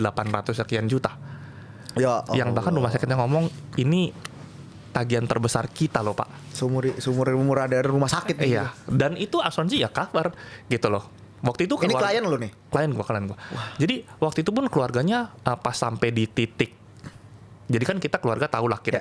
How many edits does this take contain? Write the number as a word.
zero